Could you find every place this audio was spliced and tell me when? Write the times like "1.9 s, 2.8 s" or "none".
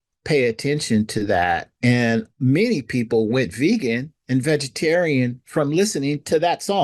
none